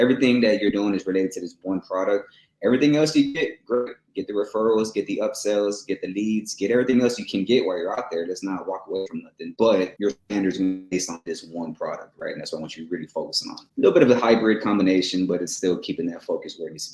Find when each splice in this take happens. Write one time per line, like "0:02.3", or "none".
0:09.4
0:09.9
0:13.6